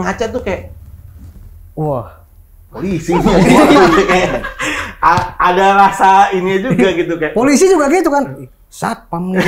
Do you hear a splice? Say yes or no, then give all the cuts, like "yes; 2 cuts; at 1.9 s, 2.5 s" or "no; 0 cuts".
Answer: no; 0 cuts